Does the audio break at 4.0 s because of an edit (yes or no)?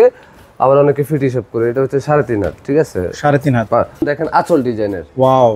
yes